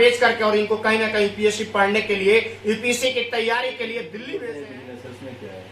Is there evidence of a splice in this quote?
yes; 1 cut; at 4.4 s

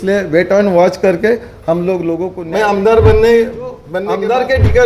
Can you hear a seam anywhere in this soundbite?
yes; 2 cuts; at 2.3 s, 3.9 s

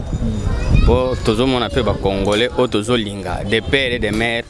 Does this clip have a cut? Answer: no; 0 cuts

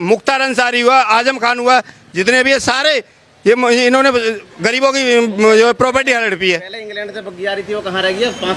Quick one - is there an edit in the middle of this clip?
no; 0 cuts

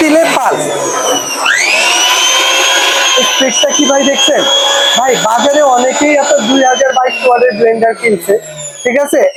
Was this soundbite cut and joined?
no; 0 cuts

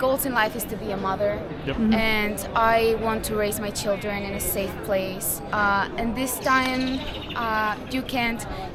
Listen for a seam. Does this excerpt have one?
no; 0 cuts

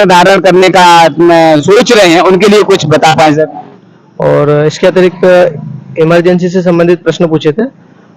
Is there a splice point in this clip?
yes; 1 cut; at 3.7 s

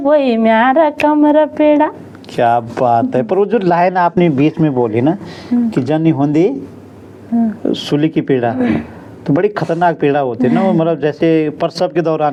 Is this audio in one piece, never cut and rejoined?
yes; 0 cuts

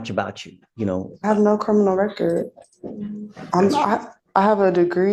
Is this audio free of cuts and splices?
yes; 0 cuts

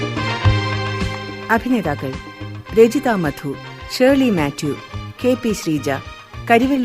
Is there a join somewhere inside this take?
yes; 1 cut; at 1.4 s

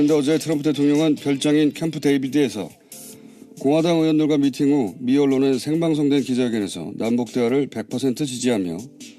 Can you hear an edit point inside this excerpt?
yes; 1 cut; at 1.8 s

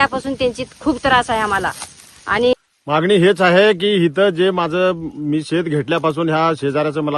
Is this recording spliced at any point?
yes; 1 cut; at 2.5 s

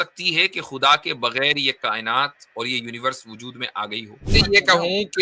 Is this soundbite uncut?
no; 1 cut; at 4.3 s

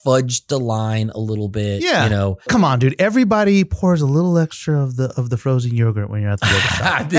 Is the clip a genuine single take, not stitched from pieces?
no; 1 cut; at 2.5 s

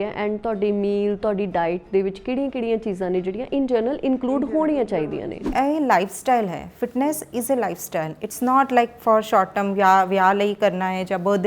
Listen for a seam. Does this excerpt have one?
yes; 1 cut; at 5.5 s

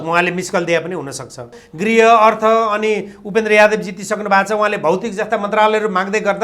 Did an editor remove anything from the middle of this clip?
yes; 1 cut; at 1.6 s

